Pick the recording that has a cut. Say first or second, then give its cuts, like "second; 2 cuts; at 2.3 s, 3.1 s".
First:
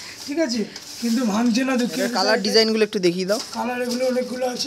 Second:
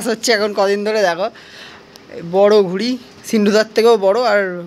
first; 1 cut; at 2.2 s